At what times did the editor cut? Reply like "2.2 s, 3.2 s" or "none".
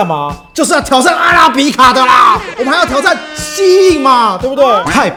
none